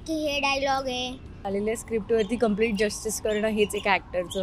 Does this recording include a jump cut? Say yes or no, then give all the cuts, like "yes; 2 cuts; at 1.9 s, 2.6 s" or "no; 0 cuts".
yes; 1 cut; at 1.4 s